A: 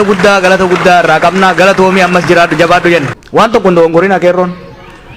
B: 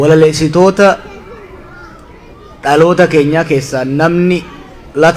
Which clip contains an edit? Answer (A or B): A